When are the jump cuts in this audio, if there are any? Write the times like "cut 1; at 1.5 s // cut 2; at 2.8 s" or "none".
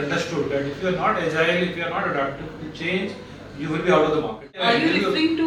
cut 1; at 4.6 s